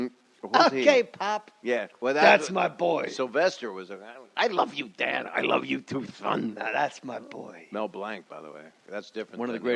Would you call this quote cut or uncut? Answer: uncut